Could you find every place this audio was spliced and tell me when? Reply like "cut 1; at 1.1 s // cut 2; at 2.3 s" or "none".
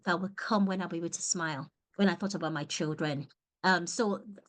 none